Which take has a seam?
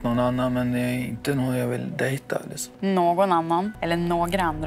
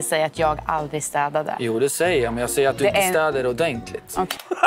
first; 2 cuts; at 2.6 s, 3.8 s

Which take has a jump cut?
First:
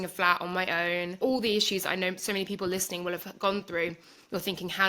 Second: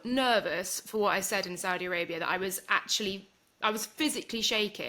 first; 1 cut; at 1.1 s

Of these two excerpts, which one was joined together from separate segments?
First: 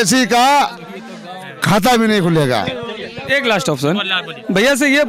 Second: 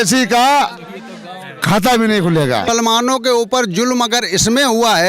second; 1 cut; at 2.7 s

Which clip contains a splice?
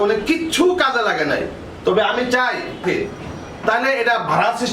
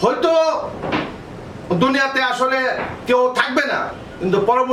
first; 1 cut; at 2.8 s

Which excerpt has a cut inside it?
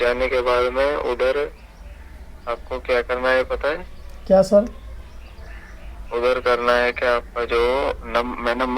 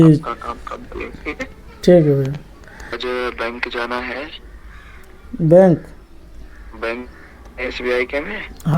second; 1 cut; at 3.0 s

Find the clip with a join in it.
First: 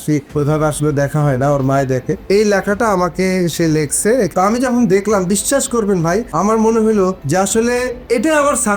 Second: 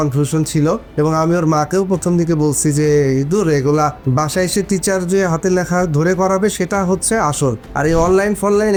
first; 2 cuts; at 2.2 s, 4.3 s

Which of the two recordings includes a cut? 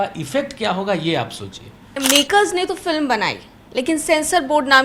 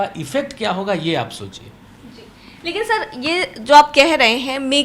first; 1 cut; at 2.0 s

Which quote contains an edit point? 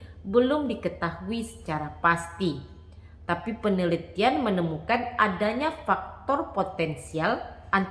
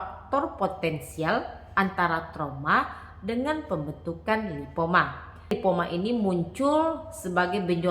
second; 1 cut; at 5.5 s

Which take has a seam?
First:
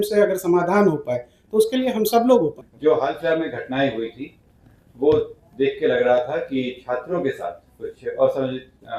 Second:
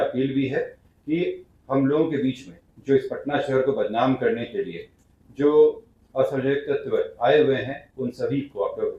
first; 1 cut; at 2.7 s

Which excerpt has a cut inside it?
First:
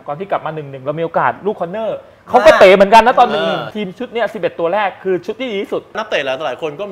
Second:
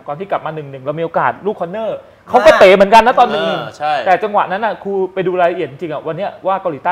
first; 2 cuts; at 3.7 s, 6.0 s

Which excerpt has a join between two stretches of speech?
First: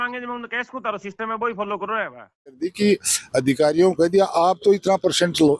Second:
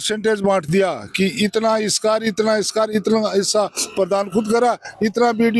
first; 1 cut; at 2.6 s

